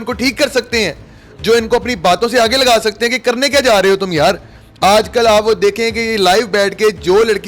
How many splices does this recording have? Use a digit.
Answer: 0